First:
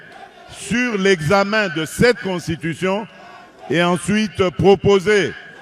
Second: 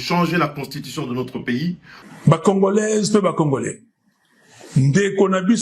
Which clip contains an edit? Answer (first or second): second